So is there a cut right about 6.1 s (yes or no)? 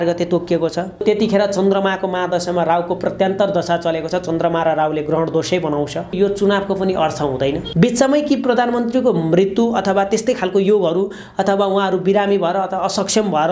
yes